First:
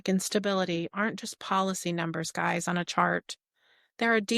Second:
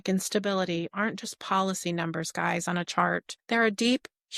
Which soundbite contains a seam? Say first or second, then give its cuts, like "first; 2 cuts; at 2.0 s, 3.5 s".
second; 1 cut; at 3.3 s